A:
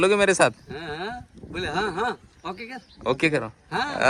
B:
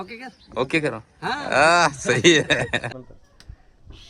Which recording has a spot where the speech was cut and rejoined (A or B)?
B